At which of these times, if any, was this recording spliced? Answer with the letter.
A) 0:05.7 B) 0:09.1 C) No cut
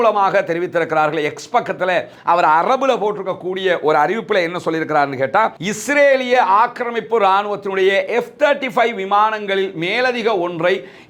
A